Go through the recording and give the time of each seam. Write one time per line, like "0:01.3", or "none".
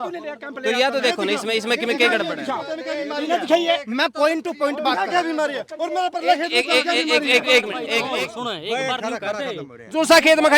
0:07.9